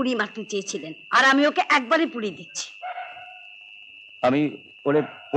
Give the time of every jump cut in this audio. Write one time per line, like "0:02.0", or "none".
none